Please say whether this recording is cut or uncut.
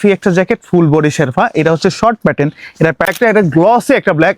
cut